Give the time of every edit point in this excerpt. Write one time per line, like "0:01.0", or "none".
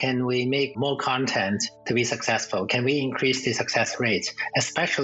0:01.7